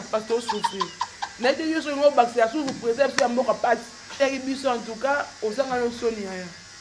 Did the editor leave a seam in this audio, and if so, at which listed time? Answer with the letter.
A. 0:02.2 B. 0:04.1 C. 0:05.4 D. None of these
B